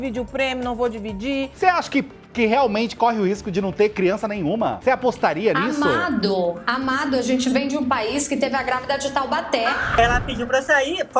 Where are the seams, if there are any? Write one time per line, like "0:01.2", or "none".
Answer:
0:01.5
0:04.8
0:10.0